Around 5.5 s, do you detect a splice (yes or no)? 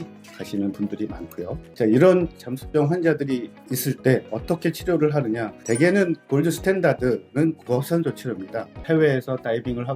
no